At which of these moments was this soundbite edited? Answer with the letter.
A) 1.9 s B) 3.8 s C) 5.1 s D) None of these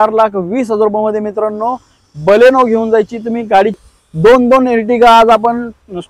B